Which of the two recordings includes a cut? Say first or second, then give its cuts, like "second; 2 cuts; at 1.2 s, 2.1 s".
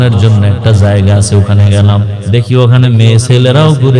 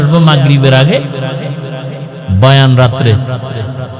first; 1 cut; at 2.2 s